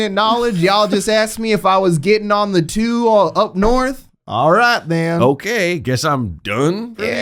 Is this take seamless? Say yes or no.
yes